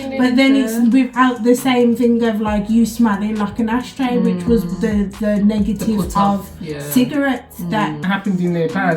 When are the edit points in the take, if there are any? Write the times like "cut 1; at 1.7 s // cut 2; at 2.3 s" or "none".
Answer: cut 1; at 8.0 s